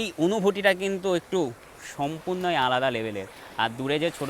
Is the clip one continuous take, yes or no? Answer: yes